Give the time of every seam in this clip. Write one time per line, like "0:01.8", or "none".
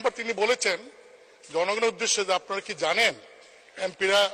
none